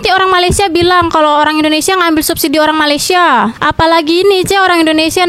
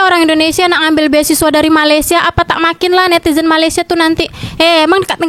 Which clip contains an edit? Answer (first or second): first